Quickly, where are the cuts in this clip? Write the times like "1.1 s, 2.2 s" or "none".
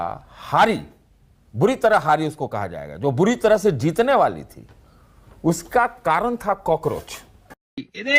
none